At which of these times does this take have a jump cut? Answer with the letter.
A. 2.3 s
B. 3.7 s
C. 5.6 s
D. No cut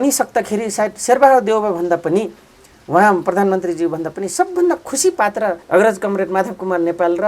C